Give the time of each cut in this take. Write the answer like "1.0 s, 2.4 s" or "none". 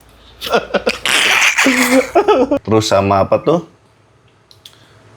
2.6 s